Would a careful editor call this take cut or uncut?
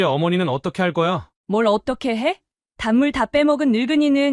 cut